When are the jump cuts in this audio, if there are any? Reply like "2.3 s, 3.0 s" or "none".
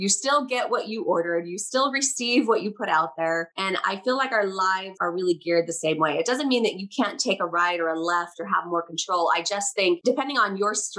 5.0 s, 10.0 s